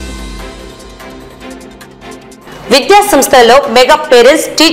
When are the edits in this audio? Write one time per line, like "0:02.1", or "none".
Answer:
0:02.0